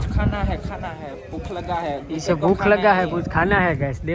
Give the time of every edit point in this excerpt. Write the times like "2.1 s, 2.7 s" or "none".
none